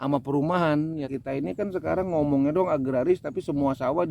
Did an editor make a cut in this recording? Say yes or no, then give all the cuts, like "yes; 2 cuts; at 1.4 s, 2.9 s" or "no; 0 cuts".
yes; 1 cut; at 1.1 s